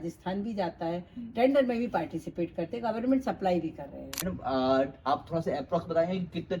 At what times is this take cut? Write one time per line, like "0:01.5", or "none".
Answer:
0:04.1